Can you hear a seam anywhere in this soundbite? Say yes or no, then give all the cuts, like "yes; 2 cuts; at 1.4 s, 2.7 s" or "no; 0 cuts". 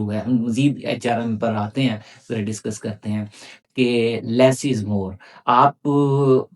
yes; 1 cut; at 3.5 s